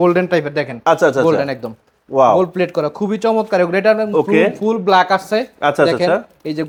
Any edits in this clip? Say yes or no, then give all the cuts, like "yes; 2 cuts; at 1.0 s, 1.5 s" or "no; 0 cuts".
no; 0 cuts